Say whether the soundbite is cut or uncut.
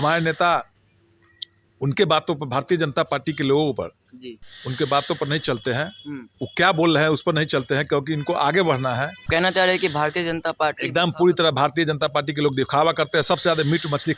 cut